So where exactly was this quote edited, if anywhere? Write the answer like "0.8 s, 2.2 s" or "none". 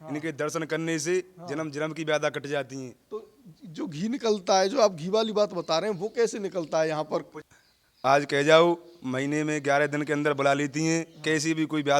7.4 s